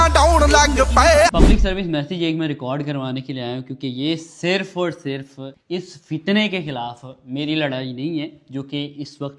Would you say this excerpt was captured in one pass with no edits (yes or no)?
yes